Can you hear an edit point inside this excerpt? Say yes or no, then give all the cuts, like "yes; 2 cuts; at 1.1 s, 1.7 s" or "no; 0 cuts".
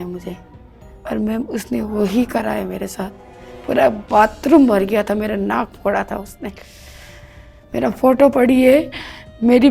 no; 0 cuts